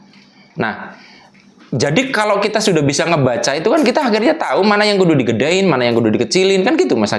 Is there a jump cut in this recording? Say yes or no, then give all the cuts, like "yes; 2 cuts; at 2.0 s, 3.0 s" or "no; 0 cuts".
no; 0 cuts